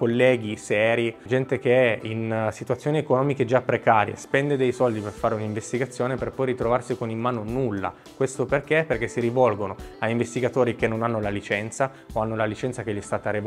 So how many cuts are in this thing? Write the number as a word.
one